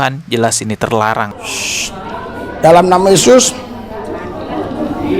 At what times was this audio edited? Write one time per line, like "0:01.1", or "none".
0:01.4